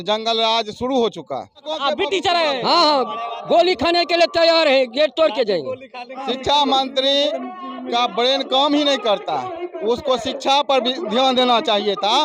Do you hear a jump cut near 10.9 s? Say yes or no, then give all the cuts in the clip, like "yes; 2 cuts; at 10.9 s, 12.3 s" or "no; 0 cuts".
no; 2 cuts; at 1.7 s, 6.1 s